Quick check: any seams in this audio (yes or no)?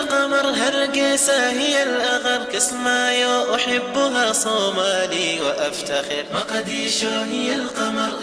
no